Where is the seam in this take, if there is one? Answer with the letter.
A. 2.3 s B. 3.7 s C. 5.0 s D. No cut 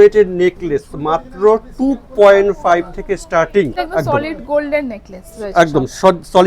B